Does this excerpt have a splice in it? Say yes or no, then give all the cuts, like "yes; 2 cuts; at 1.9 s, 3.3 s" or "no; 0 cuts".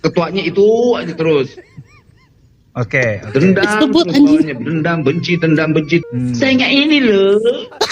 yes; 1 cut; at 6.0 s